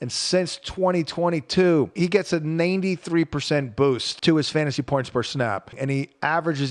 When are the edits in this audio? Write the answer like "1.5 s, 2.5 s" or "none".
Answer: 1.9 s, 4.1 s, 5.7 s